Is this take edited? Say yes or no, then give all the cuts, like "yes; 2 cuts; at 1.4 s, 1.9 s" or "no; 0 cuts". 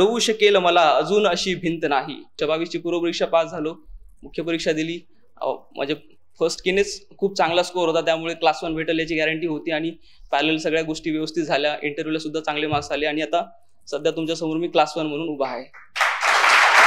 yes; 1 cut; at 2.4 s